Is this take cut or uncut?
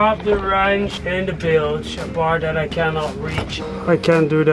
cut